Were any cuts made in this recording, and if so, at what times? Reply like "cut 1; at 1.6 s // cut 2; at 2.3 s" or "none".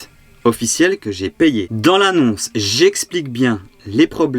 cut 1; at 1.7 s